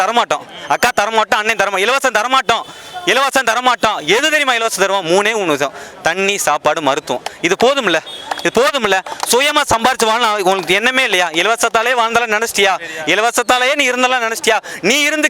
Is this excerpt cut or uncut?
uncut